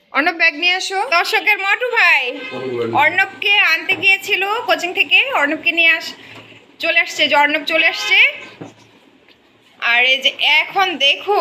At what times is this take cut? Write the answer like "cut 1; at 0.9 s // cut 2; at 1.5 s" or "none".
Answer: cut 1; at 1.1 s